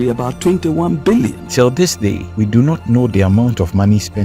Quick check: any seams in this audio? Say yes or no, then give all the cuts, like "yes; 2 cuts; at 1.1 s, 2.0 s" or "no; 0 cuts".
yes; 2 cuts; at 1.4 s, 2.2 s